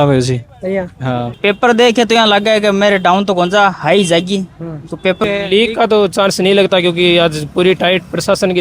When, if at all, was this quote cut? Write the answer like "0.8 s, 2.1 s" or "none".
1.3 s, 5.2 s